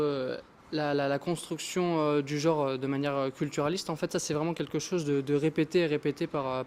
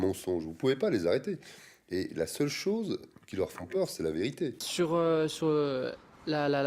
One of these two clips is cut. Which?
second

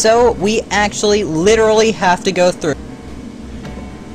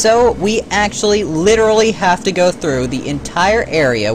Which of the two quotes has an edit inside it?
second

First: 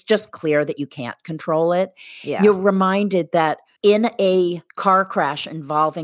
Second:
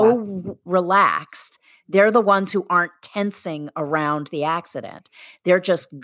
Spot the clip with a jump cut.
first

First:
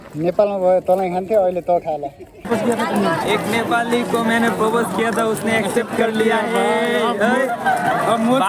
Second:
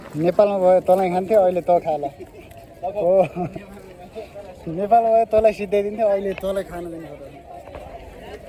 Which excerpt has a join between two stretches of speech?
first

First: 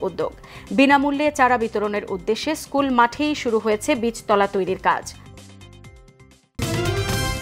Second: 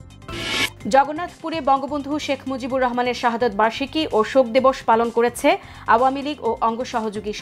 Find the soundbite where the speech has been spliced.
first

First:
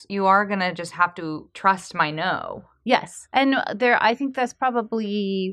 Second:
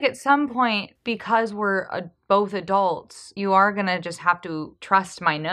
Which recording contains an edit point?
first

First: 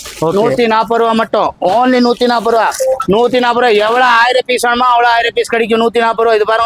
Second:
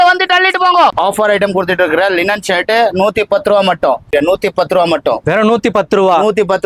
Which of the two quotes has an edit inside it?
second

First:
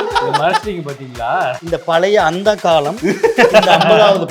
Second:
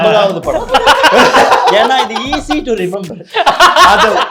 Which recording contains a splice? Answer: first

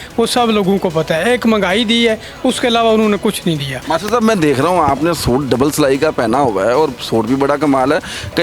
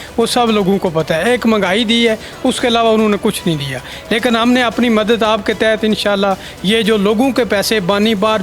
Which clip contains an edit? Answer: first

